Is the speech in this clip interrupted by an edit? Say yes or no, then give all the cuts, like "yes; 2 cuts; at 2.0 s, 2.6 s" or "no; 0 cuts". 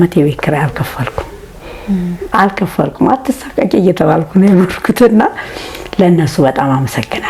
no; 0 cuts